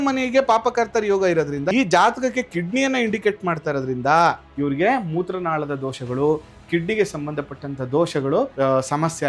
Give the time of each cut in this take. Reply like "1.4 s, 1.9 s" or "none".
1.7 s, 4.5 s, 8.5 s